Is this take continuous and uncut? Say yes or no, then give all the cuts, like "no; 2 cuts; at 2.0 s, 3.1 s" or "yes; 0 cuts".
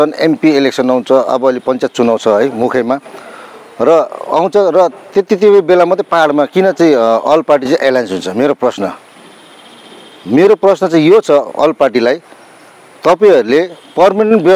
yes; 0 cuts